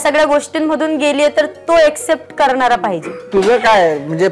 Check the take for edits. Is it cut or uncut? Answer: cut